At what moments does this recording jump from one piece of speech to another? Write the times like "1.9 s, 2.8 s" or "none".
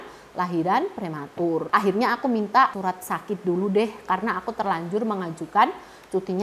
none